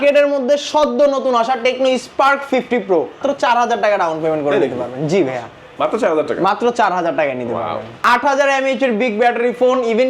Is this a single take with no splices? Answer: no; 2 cuts; at 3.2 s, 7.9 s

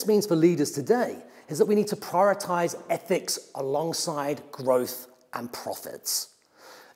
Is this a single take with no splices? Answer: yes; 0 cuts

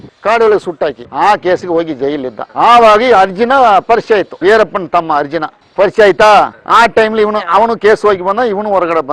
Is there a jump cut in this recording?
yes; 2 cuts; at 1.0 s, 4.3 s

